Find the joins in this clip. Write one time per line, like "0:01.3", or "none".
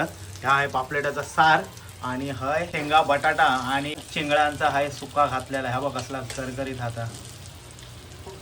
0:02.7
0:04.0